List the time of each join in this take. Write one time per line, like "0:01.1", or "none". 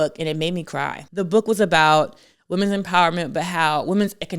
0:01.0